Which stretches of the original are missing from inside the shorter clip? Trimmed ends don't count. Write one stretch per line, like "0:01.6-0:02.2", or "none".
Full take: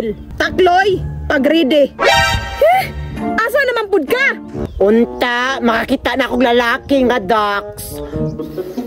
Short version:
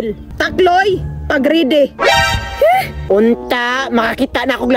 0:03.0-0:04.7